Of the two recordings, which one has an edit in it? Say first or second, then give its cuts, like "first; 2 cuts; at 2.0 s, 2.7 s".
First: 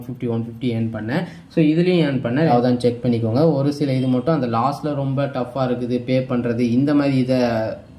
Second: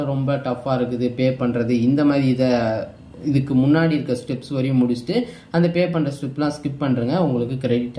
first; 1 cut; at 2.5 s